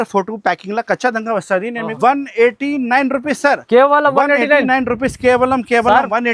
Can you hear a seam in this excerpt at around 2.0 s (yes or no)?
yes